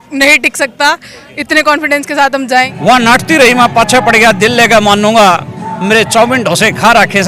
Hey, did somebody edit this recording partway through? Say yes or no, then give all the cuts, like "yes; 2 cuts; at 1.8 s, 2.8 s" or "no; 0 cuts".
yes; 1 cut; at 2.7 s